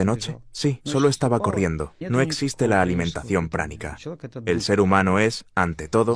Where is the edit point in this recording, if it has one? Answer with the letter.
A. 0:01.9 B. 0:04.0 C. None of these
A